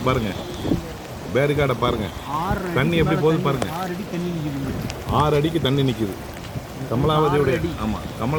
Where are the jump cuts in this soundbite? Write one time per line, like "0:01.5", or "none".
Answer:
none